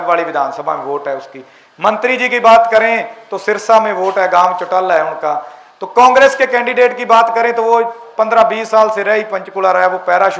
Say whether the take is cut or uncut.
uncut